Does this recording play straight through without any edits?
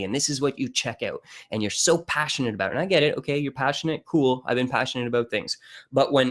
no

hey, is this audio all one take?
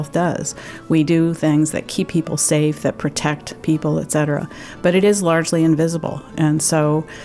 yes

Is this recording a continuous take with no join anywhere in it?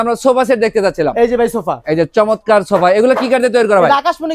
yes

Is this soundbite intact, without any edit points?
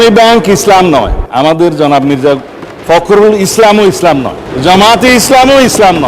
no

